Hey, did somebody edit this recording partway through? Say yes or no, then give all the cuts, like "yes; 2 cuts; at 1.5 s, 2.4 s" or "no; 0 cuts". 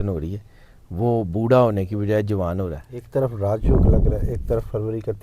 yes; 1 cut; at 2.9 s